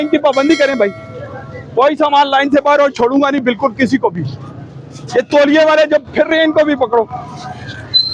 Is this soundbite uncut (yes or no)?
yes